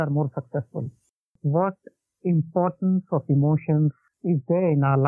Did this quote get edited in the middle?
yes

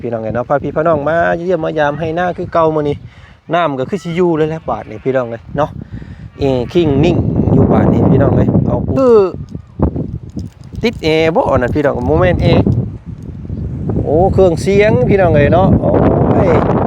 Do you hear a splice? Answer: yes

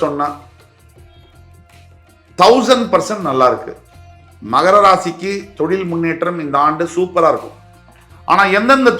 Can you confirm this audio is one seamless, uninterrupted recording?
yes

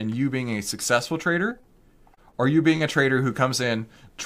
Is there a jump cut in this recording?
no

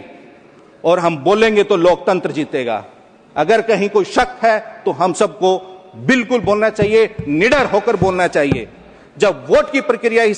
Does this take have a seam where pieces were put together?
no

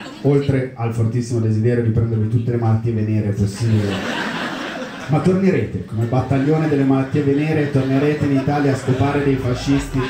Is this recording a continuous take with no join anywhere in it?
yes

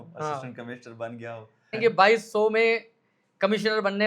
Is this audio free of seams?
no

